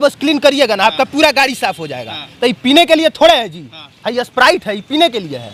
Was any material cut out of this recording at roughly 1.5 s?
no; 0 cuts

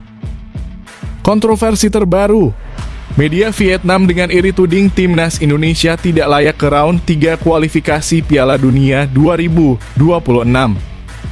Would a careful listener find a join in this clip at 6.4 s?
no; 1 cut; at 1.2 s

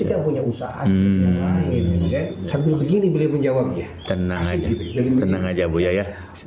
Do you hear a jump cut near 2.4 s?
yes; 1 cut; at 2.4 s

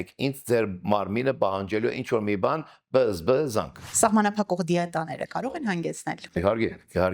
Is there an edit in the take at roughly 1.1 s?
no; 1 cut; at 3.8 s

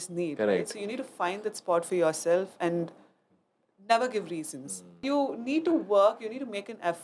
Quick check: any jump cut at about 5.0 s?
yes; 1 cut; at 5.0 s

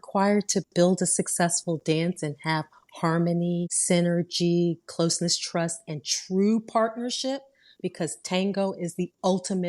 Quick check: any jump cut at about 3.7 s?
yes; 1 cut; at 3.7 s

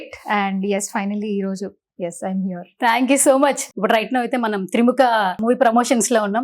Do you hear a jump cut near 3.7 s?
yes; 2 cuts; at 3.7 s, 5.4 s

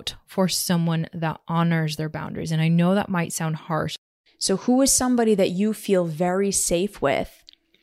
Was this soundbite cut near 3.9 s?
yes; 1 cut; at 3.9 s

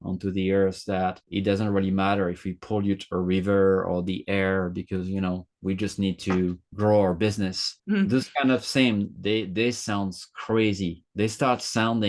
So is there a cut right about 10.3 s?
no; 0 cuts

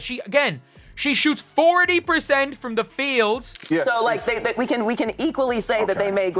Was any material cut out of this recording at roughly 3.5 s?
yes; 1 cut; at 3.5 s

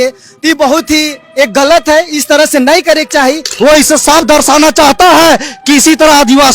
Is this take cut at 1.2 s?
no; 1 cut; at 3.5 s

